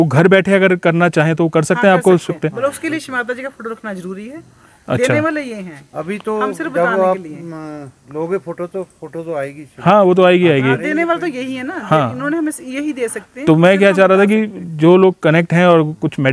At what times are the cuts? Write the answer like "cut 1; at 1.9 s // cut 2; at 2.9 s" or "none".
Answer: none